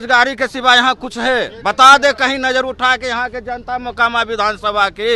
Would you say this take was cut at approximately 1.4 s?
no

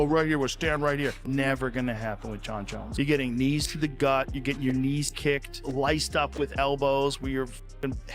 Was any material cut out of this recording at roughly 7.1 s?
no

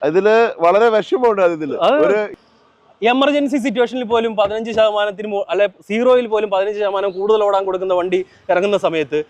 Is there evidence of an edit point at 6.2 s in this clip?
no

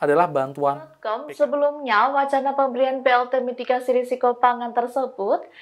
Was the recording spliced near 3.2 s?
no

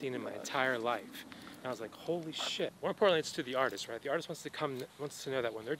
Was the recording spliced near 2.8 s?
yes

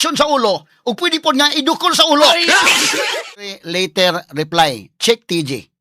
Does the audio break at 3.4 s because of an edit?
yes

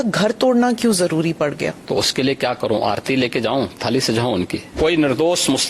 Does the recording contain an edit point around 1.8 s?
yes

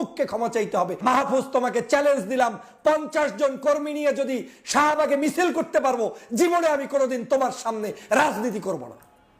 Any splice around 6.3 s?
no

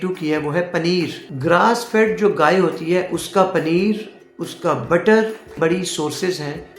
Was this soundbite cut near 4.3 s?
no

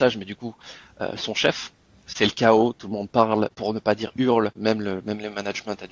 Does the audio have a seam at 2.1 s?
yes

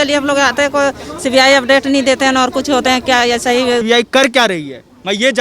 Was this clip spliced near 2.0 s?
no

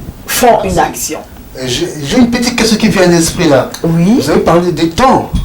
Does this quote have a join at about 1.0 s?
yes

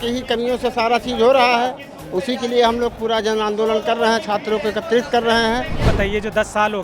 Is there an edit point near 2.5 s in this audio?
no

